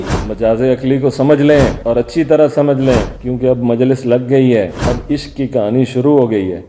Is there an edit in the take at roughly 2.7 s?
no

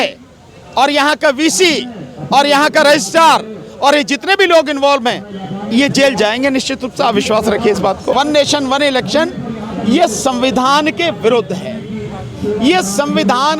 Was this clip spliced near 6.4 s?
no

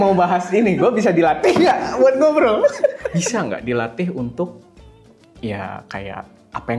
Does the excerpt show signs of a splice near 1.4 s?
no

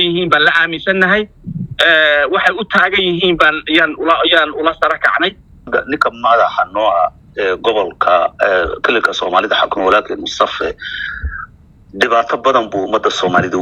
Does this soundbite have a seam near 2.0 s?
no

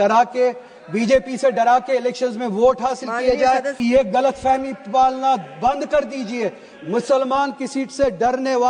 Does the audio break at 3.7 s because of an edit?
yes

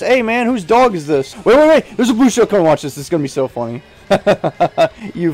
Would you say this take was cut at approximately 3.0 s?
no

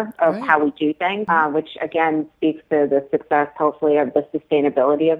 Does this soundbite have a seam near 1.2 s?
yes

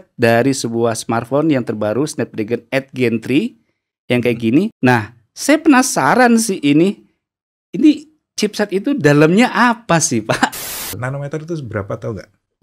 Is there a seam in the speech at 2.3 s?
no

